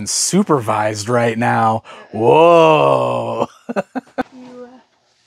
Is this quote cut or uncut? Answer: cut